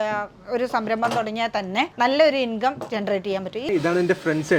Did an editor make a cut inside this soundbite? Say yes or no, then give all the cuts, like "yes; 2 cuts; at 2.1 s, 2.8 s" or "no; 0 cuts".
yes; 2 cuts; at 1.9 s, 3.6 s